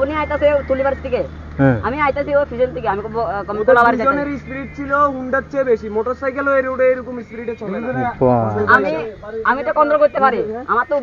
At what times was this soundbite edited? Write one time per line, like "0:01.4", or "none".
none

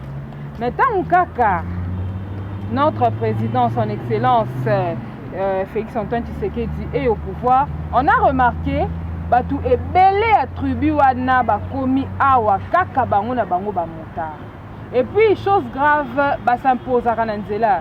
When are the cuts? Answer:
none

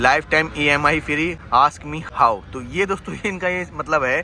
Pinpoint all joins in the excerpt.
none

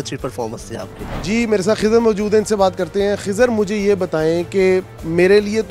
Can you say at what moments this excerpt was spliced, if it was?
none

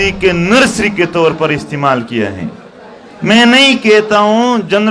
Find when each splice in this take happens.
none

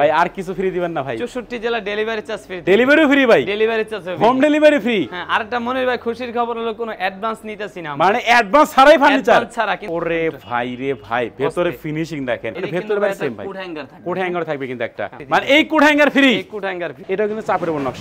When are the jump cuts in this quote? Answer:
0:09.8
0:12.5
0:15.2
0:16.9

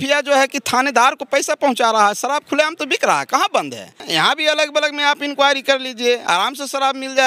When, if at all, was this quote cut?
0:04.0

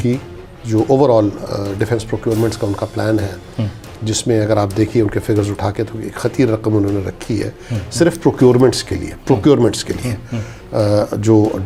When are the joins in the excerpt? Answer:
none

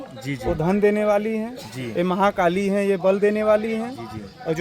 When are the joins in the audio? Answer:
none

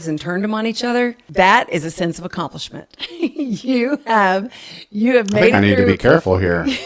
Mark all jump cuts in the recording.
0:01.2

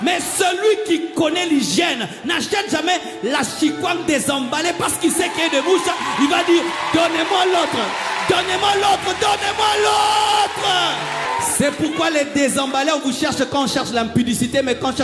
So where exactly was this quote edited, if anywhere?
0:11.3

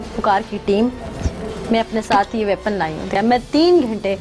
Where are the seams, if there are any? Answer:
0:03.1

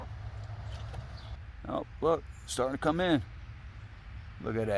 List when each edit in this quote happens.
0:01.3

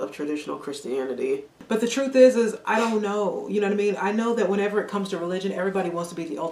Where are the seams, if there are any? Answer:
0:01.5

